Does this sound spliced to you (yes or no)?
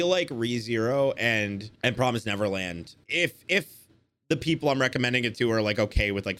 yes